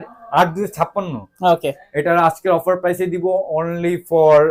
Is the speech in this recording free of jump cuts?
yes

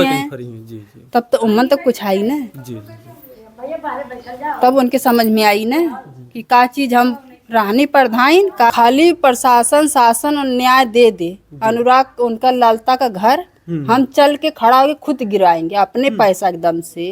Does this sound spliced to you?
yes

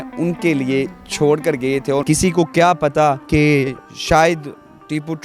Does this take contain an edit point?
yes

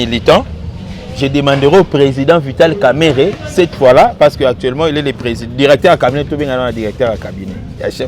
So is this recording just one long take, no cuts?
yes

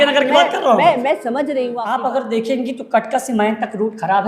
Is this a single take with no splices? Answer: no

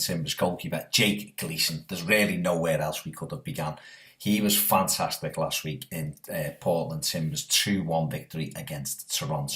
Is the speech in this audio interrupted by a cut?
yes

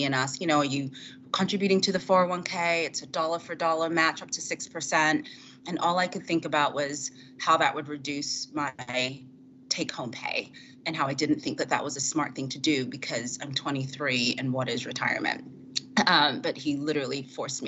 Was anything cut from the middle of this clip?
no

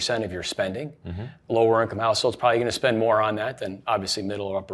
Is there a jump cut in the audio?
yes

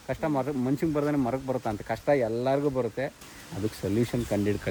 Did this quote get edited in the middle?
no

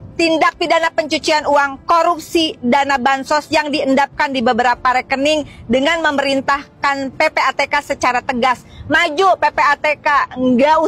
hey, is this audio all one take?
yes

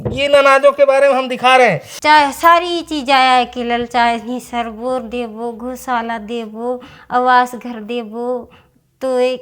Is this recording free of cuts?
no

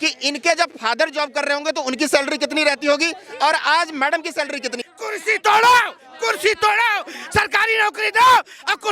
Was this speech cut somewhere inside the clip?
yes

